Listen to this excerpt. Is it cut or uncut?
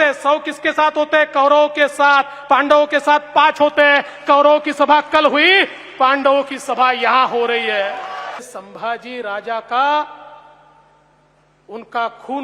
cut